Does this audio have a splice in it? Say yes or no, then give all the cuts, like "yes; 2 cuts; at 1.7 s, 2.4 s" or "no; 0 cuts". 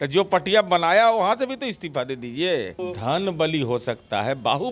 yes; 1 cut; at 2.7 s